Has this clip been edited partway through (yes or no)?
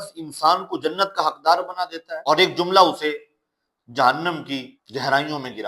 yes